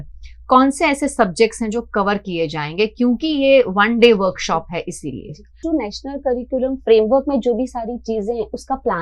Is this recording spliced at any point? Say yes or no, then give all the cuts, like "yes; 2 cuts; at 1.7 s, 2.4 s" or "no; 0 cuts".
yes; 1 cut; at 5.6 s